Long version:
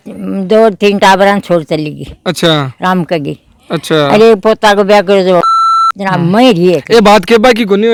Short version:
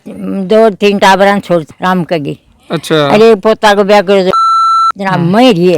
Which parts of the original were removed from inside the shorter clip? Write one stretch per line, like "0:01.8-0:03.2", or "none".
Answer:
0:01.7-0:02.7

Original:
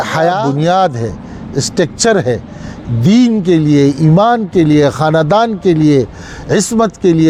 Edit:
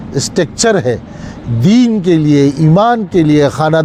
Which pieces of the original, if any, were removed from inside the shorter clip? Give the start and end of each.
none

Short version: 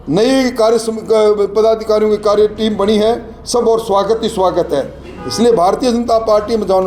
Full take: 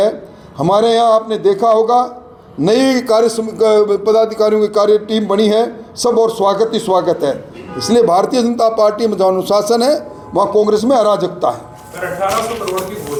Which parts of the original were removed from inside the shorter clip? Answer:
none

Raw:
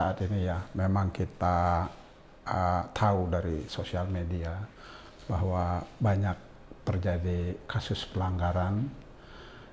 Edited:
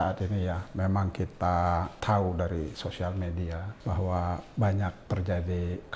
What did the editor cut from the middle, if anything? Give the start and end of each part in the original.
0:02.0-0:02.9
0:04.6-0:05.1
0:06.4-0:06.8

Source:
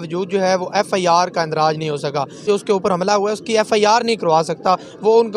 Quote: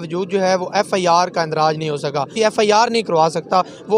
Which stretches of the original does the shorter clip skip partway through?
0:02.3-0:03.4

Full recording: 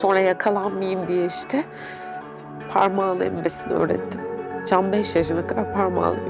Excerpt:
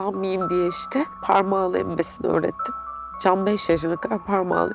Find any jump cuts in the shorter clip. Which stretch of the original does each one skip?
0:01.7-0:02.6

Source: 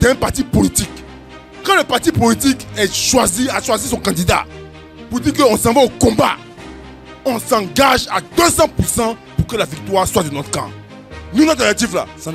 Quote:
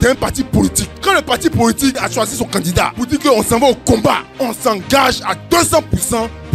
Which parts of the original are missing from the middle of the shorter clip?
0:00.9-0:01.5
0:02.7-0:03.6
0:04.4-0:05.1
0:06.4-0:07.1

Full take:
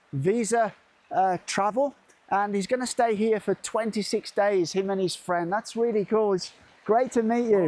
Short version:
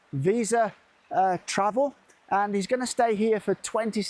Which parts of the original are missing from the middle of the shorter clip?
none

